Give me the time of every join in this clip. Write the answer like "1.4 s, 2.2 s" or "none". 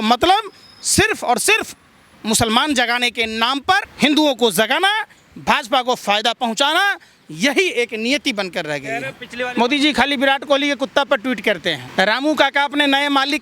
3.9 s, 9.2 s, 11.8 s